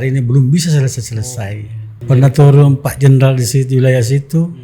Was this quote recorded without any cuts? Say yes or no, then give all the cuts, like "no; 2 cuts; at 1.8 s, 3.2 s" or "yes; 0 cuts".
no; 1 cut; at 2.0 s